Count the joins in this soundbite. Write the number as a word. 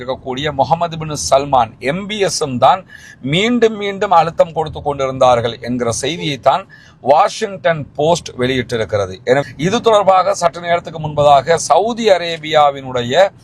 one